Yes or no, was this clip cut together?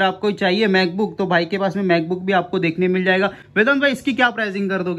no